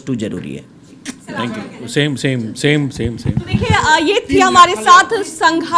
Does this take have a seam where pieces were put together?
no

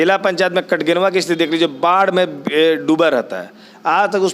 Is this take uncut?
yes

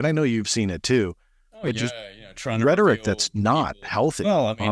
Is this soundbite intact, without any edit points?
yes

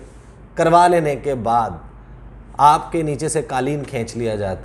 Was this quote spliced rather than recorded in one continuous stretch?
no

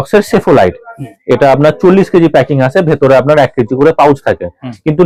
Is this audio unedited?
yes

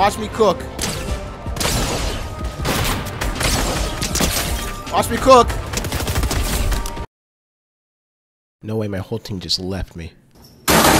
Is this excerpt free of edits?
yes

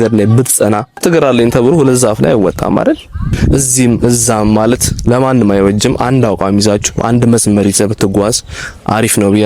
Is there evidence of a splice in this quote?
yes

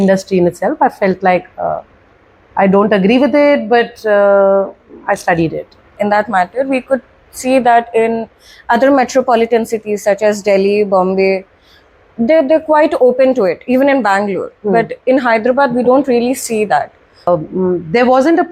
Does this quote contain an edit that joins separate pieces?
yes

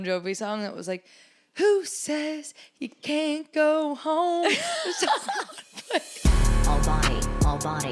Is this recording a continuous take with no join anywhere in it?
no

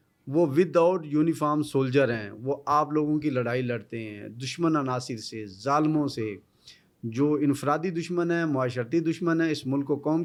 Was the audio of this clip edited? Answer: no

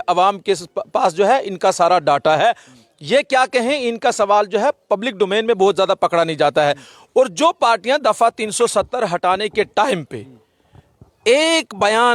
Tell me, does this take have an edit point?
no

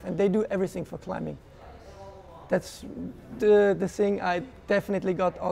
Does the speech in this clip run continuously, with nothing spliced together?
yes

